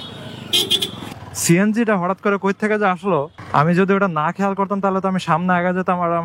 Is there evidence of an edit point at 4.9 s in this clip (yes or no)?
no